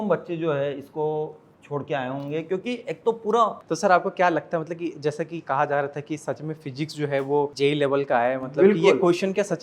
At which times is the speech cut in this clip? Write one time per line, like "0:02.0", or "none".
0:03.6
0:07.5